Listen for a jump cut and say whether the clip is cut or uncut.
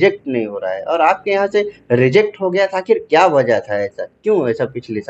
uncut